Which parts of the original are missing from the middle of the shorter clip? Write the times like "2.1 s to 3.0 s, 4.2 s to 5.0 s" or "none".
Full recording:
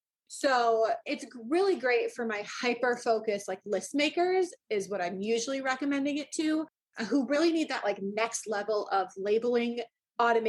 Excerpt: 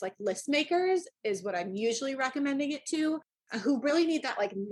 none